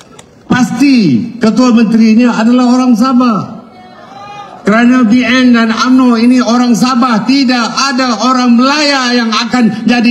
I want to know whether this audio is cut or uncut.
uncut